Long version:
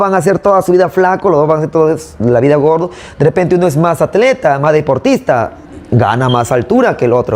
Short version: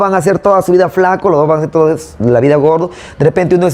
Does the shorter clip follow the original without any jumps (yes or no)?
yes